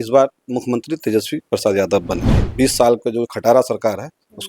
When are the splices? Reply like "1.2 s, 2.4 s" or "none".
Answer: 2.4 s